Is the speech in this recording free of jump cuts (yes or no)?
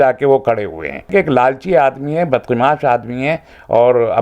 no